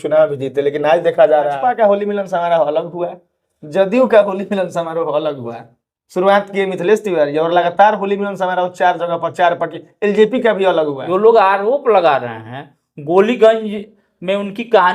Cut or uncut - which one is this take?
cut